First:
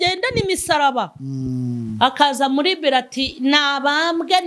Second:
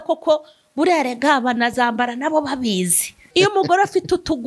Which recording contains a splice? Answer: second; 1 cut; at 3.3 s

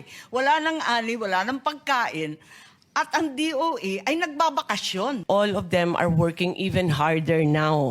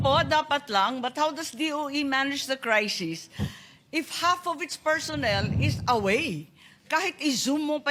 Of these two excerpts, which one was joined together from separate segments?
first; 1 cut; at 5.2 s

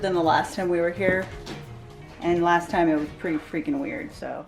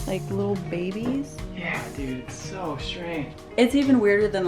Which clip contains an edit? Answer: second; 1 cut; at 3.3 s

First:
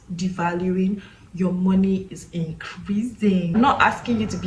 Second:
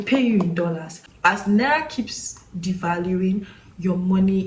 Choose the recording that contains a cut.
first; 1 cut; at 3.4 s

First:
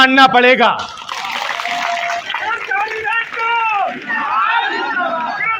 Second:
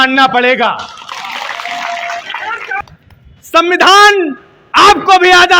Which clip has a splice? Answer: second; 1 cut; at 2.8 s

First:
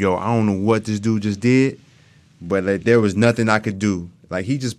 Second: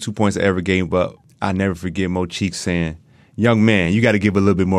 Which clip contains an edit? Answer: second; 1 cut; at 1.2 s

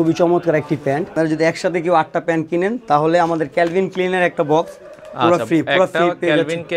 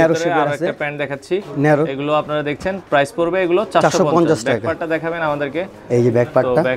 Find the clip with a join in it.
first; 1 cut; at 1.1 s

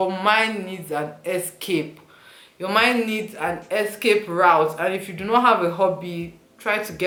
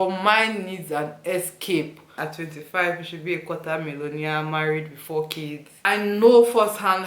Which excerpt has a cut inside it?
second; 2 cuts; at 2.1 s, 5.9 s

